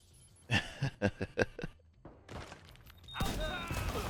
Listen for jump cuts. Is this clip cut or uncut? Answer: uncut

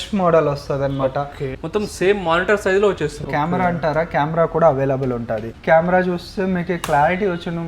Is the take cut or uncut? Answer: cut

